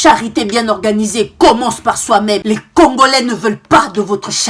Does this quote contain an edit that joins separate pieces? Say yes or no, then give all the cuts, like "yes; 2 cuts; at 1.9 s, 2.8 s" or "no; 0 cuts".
yes; 1 cut; at 2.4 s